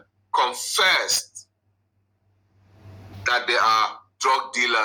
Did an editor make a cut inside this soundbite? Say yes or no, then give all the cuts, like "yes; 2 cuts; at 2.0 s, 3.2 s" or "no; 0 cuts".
no; 0 cuts